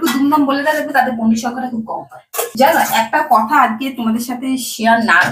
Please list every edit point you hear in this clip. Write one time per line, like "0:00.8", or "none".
0:02.5